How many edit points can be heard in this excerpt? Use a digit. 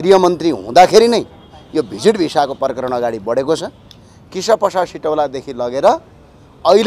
0